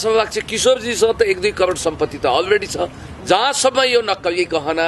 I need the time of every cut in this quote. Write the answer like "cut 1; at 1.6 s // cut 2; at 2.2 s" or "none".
cut 1; at 3.0 s